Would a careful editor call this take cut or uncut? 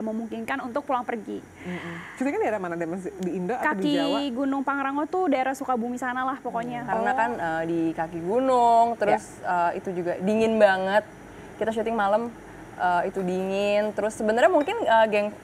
cut